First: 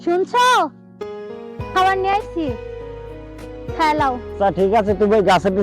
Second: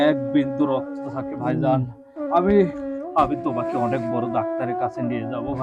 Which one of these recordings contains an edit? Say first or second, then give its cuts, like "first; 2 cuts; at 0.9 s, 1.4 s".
first; 1 cut; at 4.3 s